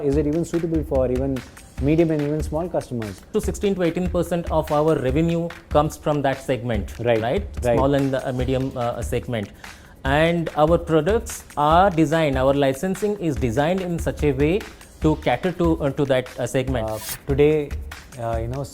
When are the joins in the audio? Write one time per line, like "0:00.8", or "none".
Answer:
0:03.3
0:16.9